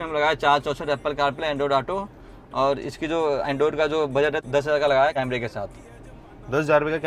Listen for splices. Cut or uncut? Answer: cut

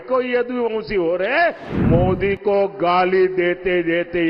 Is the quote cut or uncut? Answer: cut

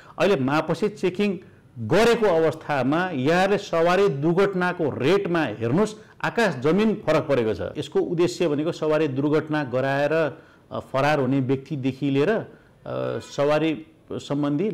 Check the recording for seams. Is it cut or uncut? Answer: cut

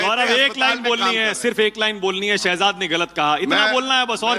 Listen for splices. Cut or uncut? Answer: uncut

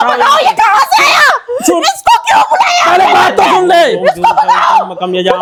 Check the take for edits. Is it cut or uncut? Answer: uncut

